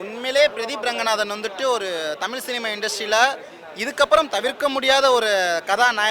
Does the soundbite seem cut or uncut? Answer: uncut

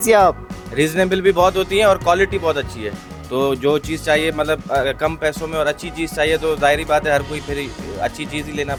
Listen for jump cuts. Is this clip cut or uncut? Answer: uncut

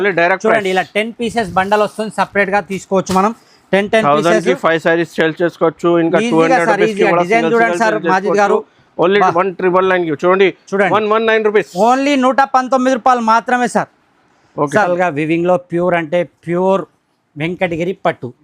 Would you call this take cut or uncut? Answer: cut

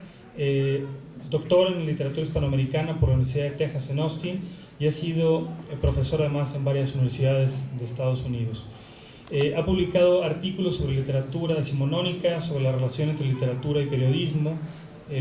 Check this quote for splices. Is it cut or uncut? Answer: uncut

